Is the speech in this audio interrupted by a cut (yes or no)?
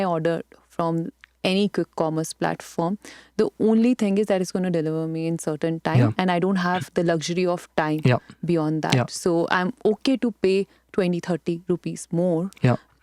no